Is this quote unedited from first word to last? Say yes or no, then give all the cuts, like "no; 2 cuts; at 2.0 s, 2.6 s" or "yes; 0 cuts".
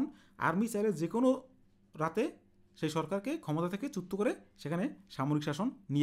yes; 0 cuts